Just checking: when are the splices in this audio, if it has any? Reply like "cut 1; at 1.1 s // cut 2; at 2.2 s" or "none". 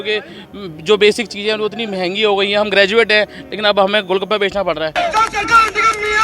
cut 1; at 5.0 s

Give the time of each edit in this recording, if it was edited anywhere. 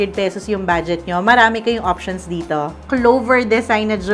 cut 1; at 2.9 s

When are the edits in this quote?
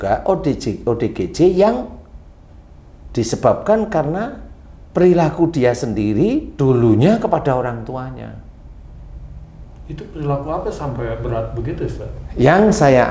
none

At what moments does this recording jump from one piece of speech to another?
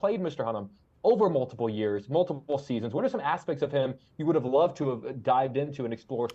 none

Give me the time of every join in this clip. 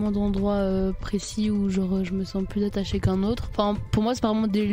cut 1; at 3.4 s

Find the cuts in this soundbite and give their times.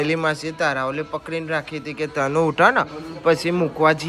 none

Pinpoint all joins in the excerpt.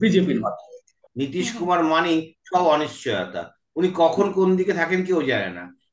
cut 1; at 1.0 s

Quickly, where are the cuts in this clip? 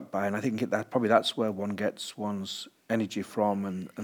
none

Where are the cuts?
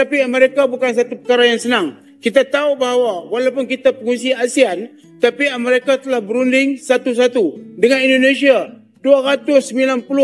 none

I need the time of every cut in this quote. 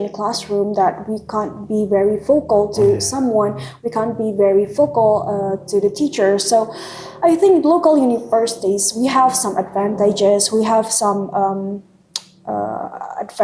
none

